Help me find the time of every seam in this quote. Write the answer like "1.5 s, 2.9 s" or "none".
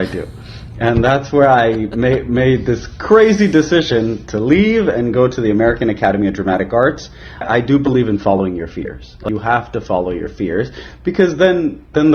7.4 s, 9.2 s